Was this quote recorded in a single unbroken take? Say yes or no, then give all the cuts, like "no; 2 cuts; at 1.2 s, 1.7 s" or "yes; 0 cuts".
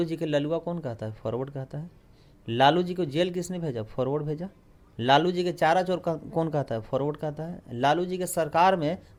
yes; 0 cuts